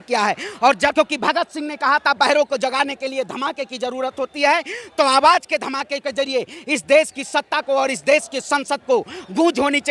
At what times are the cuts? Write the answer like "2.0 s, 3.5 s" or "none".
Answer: 0.9 s